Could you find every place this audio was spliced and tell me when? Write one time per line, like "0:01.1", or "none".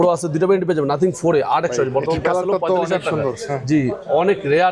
none